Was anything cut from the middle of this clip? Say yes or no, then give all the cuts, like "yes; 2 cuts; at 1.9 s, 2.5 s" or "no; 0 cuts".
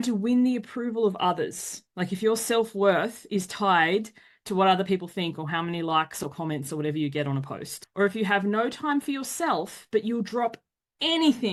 no; 0 cuts